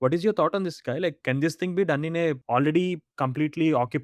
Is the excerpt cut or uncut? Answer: cut